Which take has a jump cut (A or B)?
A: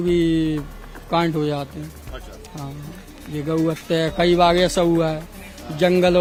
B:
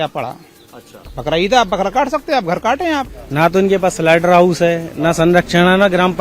B